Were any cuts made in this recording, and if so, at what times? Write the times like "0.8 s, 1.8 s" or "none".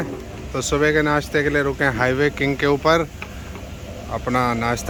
none

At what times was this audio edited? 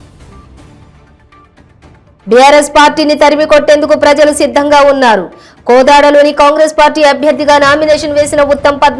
none

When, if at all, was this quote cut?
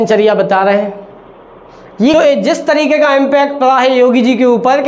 2.1 s

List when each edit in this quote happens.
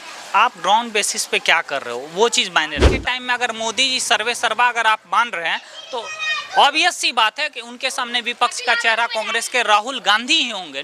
3.1 s

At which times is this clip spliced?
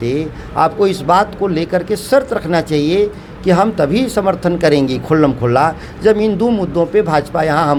none

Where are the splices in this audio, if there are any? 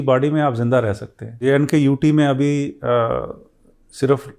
1.4 s

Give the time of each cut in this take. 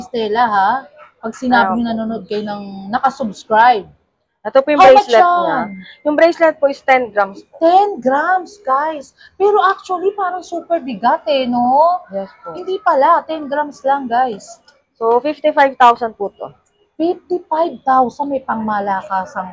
none

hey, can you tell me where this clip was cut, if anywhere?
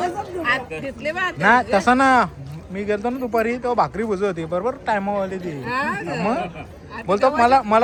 none

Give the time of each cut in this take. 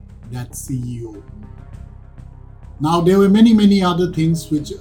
none

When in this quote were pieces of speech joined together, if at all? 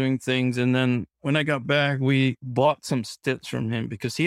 2.4 s

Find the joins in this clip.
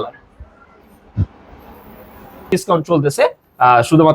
2.5 s

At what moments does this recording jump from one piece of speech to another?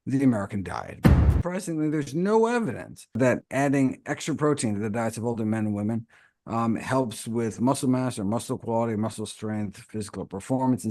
1.0 s, 3.4 s

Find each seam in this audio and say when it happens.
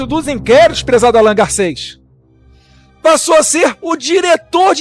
none

